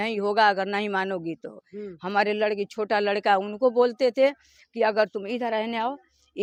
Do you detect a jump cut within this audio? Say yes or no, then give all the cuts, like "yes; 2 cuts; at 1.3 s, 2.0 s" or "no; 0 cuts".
no; 0 cuts